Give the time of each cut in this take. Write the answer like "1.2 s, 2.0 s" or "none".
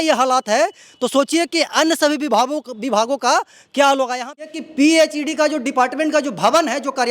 4.4 s

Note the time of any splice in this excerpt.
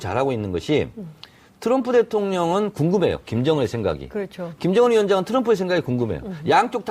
1.0 s

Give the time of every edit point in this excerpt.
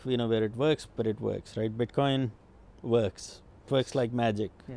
3.6 s

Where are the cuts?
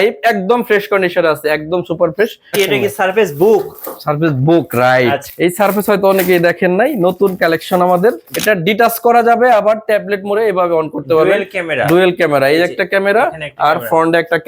2.6 s, 5.2 s, 8.3 s

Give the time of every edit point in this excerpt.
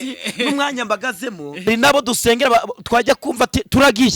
1.7 s

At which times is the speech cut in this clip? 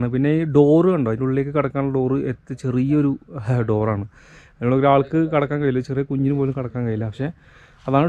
none

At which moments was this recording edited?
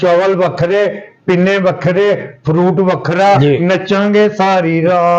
3.4 s

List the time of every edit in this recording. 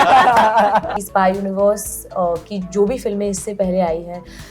0.9 s

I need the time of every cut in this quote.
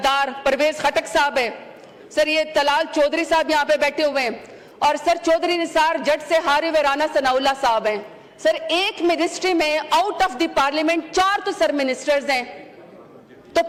none

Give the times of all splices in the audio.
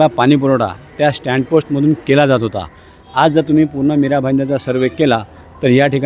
none

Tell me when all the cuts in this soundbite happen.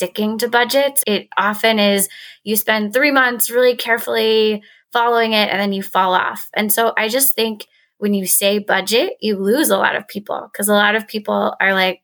1.0 s

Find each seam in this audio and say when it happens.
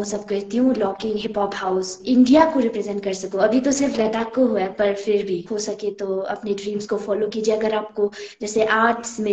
1.9 s, 5.4 s

